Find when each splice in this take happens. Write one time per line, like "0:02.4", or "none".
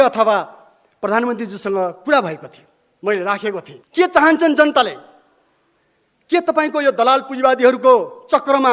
0:03.7

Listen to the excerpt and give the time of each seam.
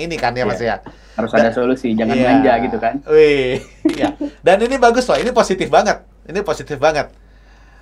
none

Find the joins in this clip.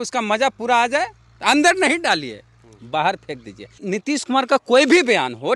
0:03.7

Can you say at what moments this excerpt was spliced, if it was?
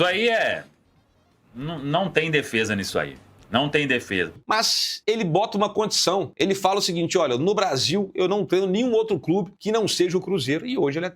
0:04.3

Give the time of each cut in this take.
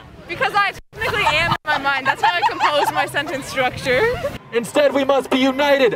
0:04.4

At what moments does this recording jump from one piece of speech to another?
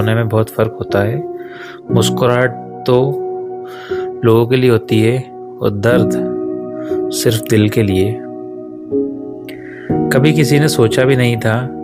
0:08.6
0:10.1

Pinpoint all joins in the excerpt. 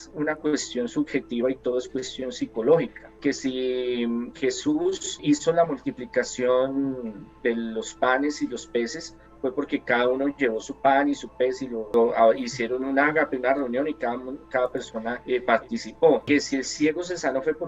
0:03.0
0:05.2
0:11.8
0:15.2
0:16.2

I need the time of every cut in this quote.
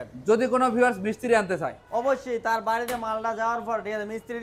none

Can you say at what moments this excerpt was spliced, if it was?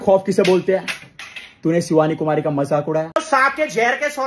0:03.1

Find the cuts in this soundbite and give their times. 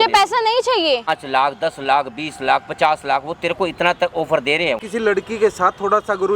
0:01.1
0:04.9

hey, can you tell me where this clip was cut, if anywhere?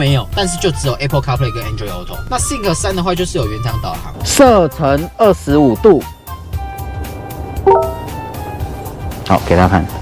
0:04.2

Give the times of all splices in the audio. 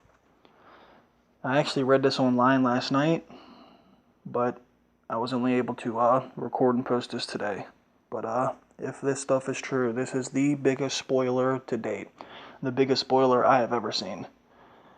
0:07.2

